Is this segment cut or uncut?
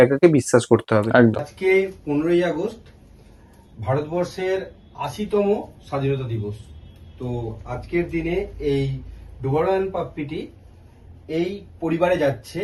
uncut